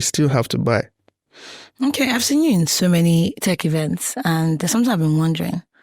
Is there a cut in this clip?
no; 0 cuts

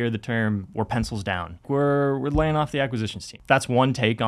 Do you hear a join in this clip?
yes; 2 cuts; at 1.6 s, 3.3 s

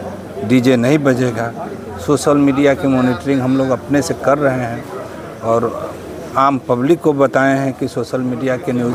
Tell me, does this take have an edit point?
no; 0 cuts

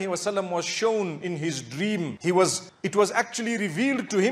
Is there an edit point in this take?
no; 0 cuts

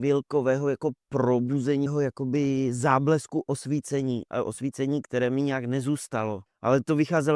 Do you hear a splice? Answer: yes; 2 cuts; at 1.9 s, 6.5 s

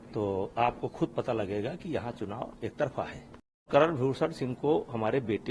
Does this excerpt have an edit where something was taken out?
yes; 1 cut; at 3.7 s

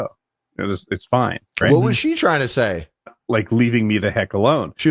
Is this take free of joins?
no; 1 cut; at 3.2 s

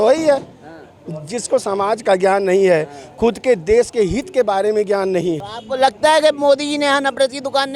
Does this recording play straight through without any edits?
no; 1 cut; at 5.6 s

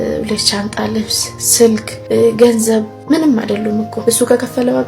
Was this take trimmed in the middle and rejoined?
yes; 3 cuts; at 1.9 s, 2.9 s, 3.9 s

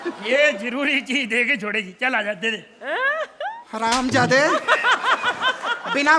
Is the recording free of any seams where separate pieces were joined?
yes; 0 cuts

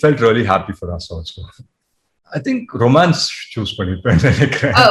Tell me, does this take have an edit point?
yes; 1 cut; at 2.1 s

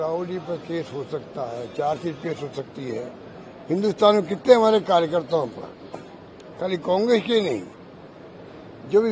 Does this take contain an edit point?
no; 0 cuts

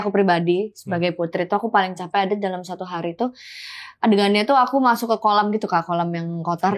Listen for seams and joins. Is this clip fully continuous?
yes; 0 cuts

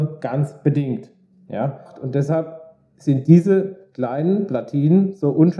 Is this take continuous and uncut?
no; 1 cut; at 1.9 s

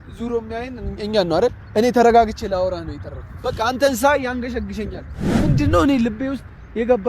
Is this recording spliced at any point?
yes; 1 cut; at 5.4 s

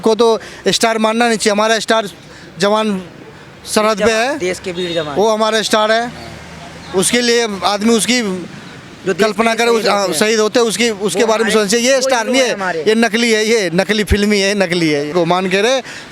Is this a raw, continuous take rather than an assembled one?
no; 1 cut; at 15.1 s

